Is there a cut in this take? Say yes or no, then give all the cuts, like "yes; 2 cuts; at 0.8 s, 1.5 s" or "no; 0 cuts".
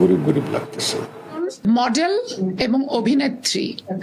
yes; 1 cut; at 1.4 s